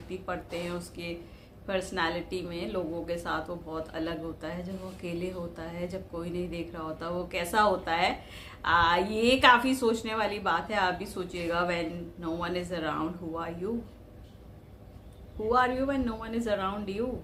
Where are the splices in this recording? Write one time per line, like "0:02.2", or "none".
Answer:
none